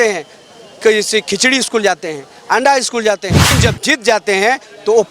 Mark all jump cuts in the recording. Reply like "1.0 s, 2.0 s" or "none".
3.6 s

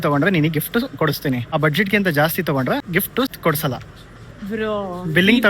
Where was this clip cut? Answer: 1.5 s, 3.0 s

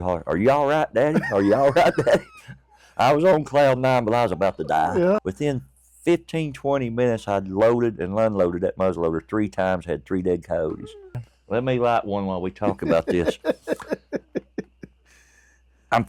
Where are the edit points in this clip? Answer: 5.2 s, 11.2 s

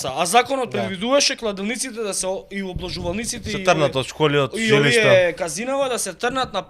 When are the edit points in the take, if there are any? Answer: none

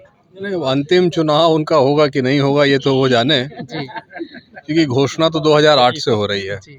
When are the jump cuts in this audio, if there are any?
none

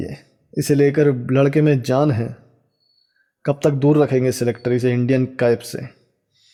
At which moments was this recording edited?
none

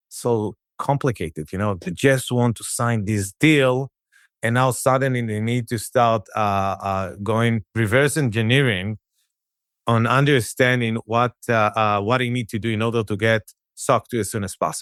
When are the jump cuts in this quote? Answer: none

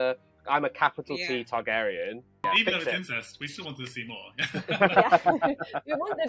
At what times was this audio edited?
2.4 s

